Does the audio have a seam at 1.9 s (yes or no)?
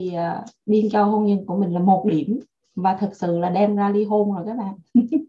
no